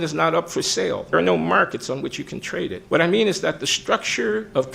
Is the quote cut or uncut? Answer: cut